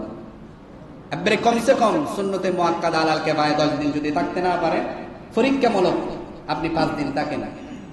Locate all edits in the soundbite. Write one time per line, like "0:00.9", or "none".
none